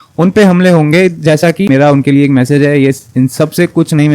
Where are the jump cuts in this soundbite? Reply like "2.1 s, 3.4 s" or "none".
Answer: 1.7 s